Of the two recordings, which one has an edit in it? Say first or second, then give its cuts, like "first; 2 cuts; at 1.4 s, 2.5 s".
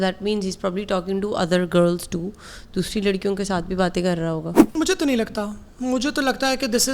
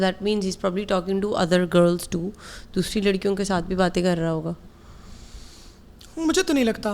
first; 1 cut; at 4.6 s